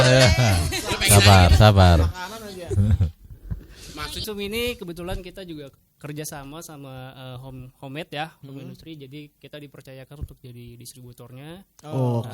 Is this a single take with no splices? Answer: no; 1 cut; at 4.2 s

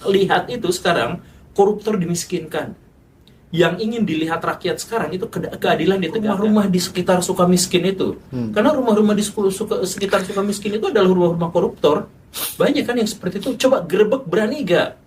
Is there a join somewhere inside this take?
yes; 1 cut; at 6.3 s

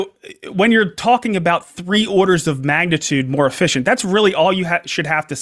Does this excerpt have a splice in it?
no; 0 cuts

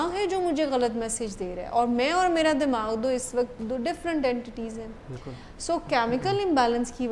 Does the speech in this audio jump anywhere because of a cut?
no; 0 cuts

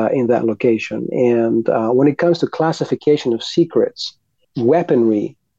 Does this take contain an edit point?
yes; 1 cut; at 4.5 s

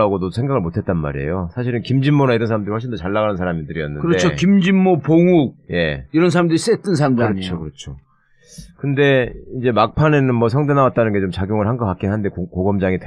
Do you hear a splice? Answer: yes; 1 cut; at 9.4 s

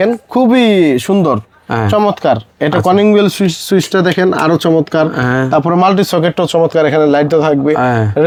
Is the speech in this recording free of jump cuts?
yes; 0 cuts

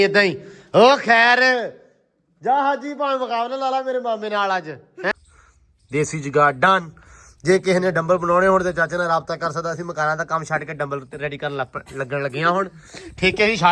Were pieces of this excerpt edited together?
yes; 1 cut; at 5.1 s

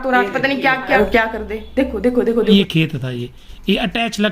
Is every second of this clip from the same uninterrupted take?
no; 2 cuts; at 0.9 s, 2.4 s

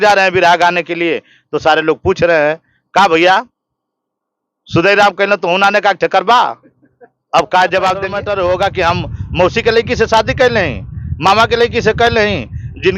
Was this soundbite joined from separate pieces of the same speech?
yes; 1 cut; at 8.1 s

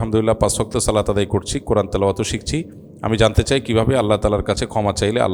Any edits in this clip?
no; 0 cuts

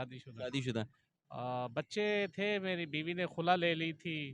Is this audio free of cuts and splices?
no; 1 cut; at 1.0 s

